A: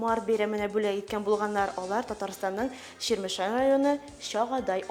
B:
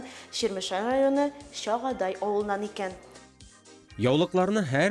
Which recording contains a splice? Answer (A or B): B